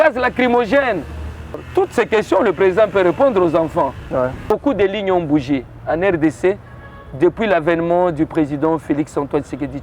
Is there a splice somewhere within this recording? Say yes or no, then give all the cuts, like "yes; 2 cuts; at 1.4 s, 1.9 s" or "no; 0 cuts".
yes; 2 cuts; at 1.6 s, 4.4 s